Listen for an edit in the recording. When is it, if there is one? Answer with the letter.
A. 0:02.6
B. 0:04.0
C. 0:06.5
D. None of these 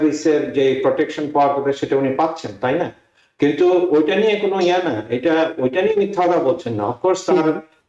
D